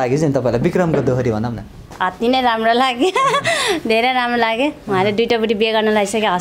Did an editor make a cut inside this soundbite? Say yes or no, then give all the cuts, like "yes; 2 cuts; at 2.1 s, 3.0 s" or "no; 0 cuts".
no; 0 cuts